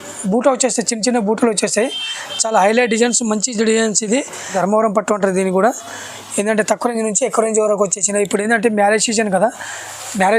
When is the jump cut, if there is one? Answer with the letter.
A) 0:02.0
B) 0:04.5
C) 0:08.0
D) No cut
B